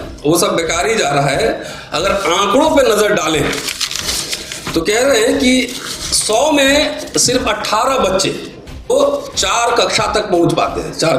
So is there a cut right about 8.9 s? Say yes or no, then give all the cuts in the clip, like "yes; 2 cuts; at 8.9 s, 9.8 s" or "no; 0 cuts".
yes; 1 cut; at 8.9 s